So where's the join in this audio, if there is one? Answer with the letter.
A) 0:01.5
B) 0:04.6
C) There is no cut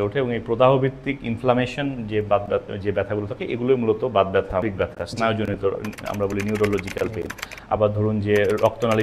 B